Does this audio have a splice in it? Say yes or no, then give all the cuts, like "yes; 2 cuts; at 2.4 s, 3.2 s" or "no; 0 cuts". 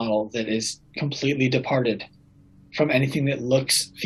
no; 0 cuts